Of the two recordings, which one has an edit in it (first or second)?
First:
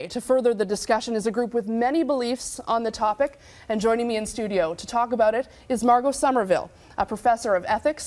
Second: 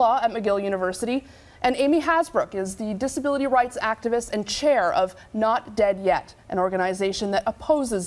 second